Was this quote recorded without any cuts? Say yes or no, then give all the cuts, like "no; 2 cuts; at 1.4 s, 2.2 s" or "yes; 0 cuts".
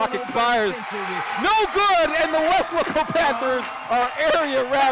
yes; 0 cuts